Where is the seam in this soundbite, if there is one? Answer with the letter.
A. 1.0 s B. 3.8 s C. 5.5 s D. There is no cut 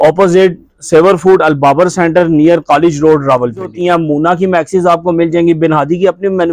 B